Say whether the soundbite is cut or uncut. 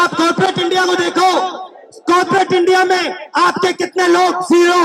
uncut